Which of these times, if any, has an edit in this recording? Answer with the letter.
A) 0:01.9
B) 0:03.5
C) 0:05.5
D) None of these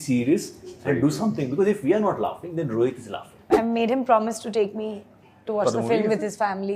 B